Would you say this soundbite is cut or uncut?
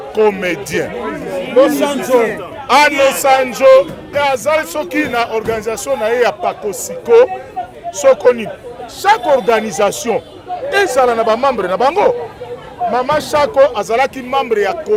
uncut